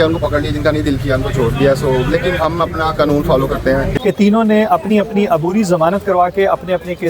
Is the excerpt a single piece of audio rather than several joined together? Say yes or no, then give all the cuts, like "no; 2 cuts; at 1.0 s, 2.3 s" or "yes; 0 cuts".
no; 1 cut; at 3.9 s